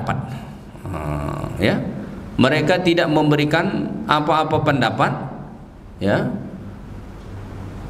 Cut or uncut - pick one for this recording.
uncut